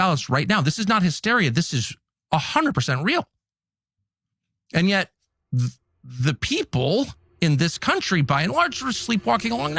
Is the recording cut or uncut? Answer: uncut